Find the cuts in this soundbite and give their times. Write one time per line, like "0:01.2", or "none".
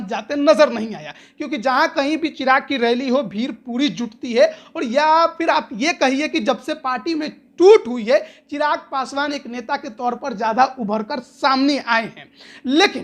none